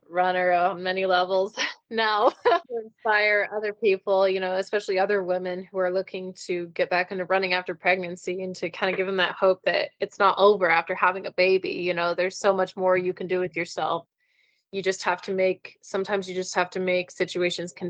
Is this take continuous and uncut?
no; 1 cut; at 2.7 s

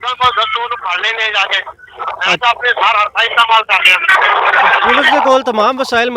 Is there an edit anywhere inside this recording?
no; 0 cuts

